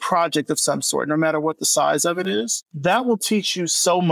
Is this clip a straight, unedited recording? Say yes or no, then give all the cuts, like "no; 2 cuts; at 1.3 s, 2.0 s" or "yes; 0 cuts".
no; 1 cut; at 2.6 s